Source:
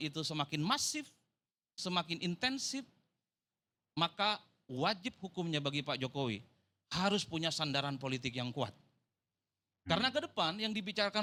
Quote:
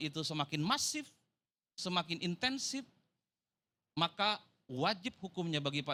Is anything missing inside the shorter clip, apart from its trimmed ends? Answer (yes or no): no